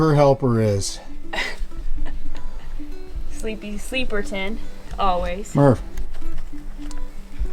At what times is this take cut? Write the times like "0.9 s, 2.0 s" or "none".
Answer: none